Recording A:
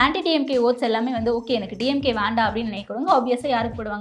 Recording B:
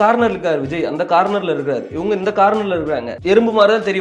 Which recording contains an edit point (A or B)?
B